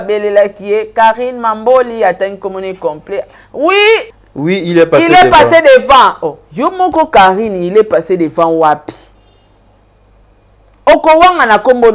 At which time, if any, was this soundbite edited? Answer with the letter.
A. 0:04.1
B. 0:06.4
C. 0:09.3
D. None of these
A